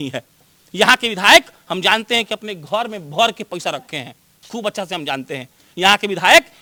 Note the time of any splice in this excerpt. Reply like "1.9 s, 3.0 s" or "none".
none